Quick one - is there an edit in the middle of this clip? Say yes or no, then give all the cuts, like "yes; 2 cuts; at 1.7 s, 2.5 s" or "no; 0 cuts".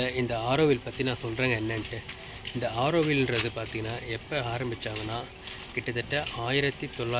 no; 0 cuts